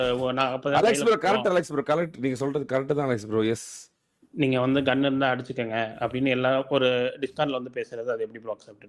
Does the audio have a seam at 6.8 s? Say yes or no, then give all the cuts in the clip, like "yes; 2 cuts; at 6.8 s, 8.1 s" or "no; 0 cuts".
no; 0 cuts